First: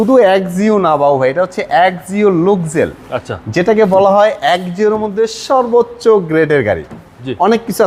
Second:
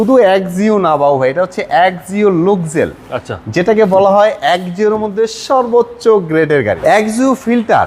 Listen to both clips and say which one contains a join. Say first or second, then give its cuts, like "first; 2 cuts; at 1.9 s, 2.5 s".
second; 1 cut; at 6.8 s